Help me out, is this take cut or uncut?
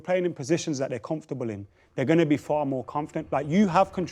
uncut